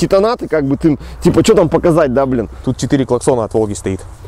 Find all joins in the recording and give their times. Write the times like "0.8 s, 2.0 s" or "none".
2.5 s